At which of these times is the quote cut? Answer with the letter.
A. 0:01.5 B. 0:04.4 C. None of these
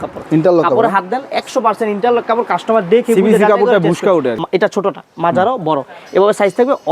B